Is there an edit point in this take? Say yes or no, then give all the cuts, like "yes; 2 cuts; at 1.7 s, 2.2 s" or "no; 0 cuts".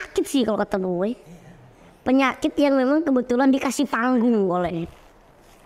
no; 0 cuts